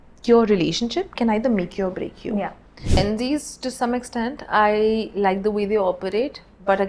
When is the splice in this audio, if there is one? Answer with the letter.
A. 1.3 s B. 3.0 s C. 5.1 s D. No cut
B